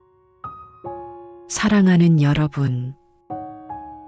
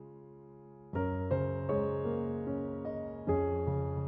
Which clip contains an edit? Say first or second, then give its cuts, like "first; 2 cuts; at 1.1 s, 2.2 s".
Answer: first; 1 cut; at 1.5 s